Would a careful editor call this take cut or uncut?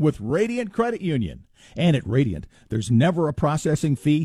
uncut